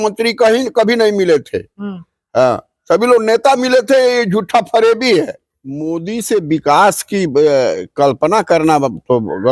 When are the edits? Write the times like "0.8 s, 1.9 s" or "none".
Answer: 5.9 s